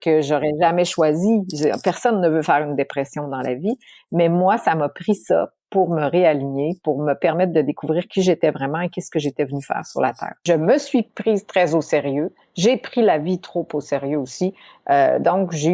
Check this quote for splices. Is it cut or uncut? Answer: cut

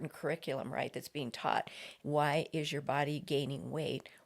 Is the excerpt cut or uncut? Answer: cut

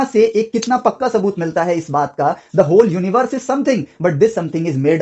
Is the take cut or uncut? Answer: uncut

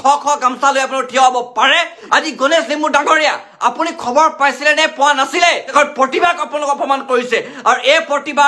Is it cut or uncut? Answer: cut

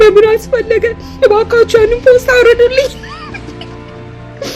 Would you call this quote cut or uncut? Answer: uncut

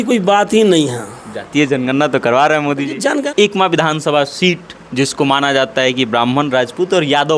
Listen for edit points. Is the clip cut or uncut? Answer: cut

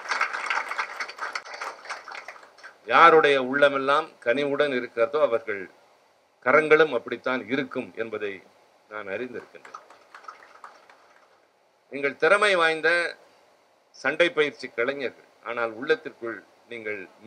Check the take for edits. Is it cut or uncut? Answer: uncut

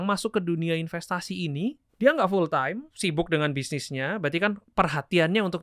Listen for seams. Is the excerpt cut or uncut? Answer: cut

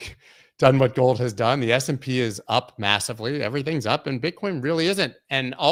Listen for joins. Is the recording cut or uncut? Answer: uncut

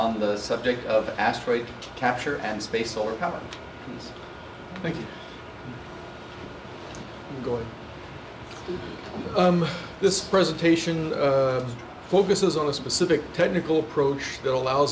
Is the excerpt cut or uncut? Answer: uncut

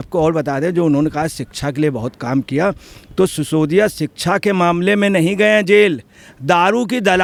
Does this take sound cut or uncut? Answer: uncut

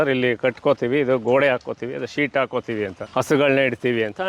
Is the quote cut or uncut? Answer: cut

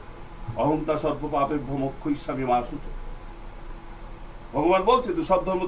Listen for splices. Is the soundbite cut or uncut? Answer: uncut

